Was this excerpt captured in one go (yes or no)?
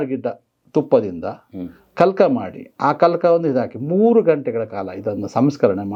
yes